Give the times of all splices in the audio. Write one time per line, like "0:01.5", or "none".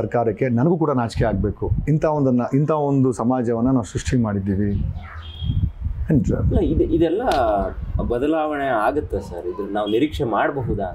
none